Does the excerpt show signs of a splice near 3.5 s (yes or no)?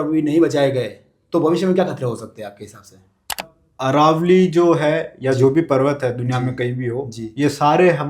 yes